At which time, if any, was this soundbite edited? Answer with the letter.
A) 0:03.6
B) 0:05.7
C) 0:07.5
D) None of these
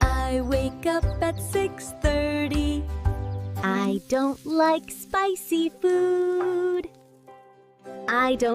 A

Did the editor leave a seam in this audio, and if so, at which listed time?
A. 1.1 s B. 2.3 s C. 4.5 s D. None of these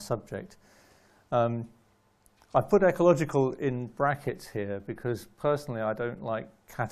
A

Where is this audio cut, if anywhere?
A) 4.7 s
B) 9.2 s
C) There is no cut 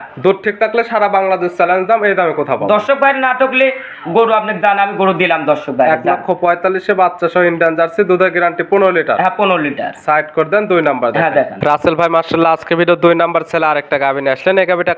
C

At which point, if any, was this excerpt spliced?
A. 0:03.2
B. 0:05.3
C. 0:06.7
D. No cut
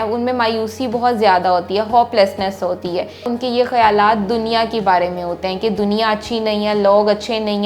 A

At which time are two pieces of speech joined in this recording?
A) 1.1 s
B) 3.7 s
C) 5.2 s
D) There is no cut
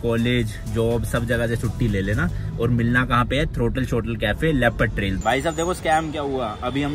C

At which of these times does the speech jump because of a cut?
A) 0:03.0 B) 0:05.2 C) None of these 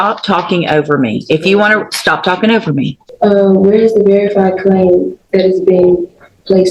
A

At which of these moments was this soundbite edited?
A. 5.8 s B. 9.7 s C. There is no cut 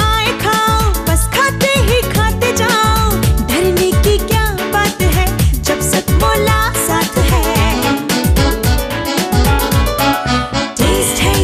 C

